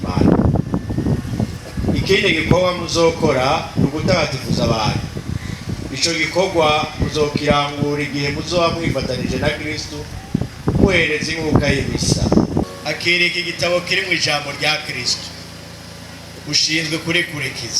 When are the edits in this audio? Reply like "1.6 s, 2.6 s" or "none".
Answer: 12.6 s

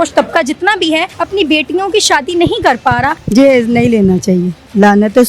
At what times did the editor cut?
1.1 s, 3.2 s

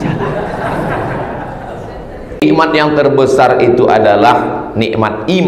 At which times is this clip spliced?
2.4 s

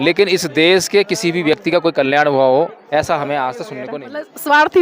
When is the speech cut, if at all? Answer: 3.7 s

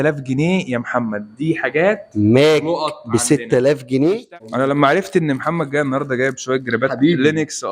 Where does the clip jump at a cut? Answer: 4.4 s

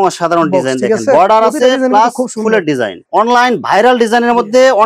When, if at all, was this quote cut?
3.0 s

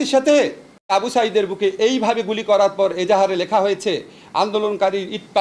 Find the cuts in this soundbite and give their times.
0.9 s

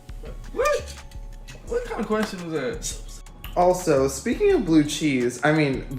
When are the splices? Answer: 3.1 s

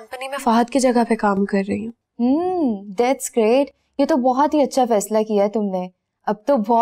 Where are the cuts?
none

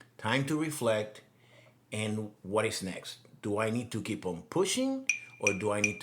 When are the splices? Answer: none

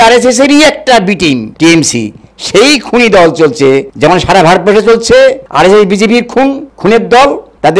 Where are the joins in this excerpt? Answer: 1.5 s, 3.9 s, 5.4 s, 6.7 s

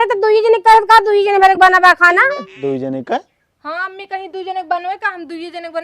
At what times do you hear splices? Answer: 2.5 s

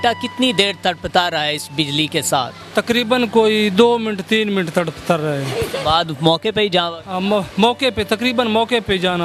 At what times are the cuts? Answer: none

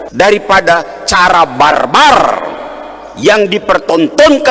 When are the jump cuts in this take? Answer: none

